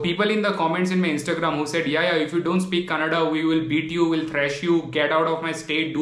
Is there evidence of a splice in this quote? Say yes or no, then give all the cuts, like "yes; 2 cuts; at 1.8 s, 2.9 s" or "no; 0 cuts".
no; 0 cuts